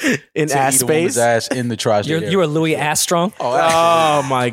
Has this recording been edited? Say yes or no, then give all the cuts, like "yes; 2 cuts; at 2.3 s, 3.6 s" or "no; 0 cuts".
no; 0 cuts